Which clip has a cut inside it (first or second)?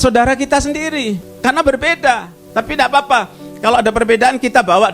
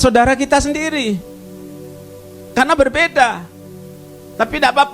first